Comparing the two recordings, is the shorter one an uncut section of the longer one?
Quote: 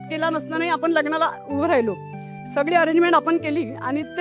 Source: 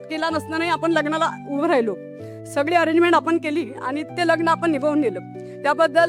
yes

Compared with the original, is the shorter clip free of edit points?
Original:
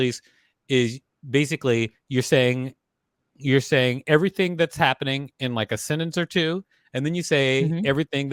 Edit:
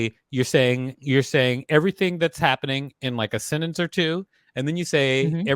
no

